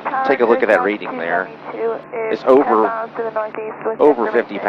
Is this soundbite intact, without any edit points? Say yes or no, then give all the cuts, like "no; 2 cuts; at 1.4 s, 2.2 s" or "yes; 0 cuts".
yes; 0 cuts